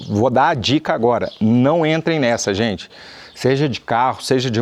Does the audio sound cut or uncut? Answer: uncut